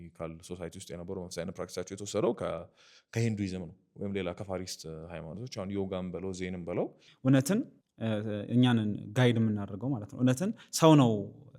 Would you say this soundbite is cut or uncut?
cut